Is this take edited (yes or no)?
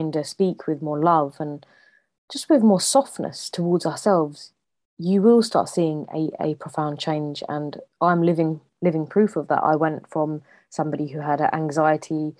no